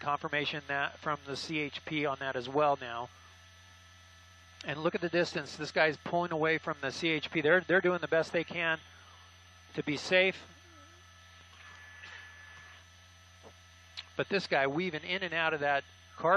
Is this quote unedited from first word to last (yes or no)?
yes